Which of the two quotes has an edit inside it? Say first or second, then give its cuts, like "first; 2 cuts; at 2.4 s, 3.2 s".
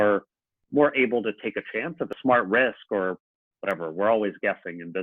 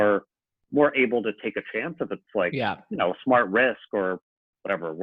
first; 1 cut; at 2.2 s